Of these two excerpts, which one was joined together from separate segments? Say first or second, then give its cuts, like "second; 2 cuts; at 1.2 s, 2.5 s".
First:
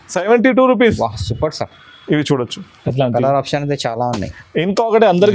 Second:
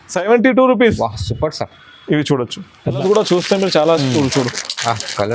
second; 1 cut; at 3.0 s